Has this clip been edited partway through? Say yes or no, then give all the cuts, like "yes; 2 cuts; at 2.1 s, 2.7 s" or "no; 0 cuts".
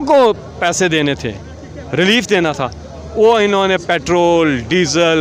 no; 0 cuts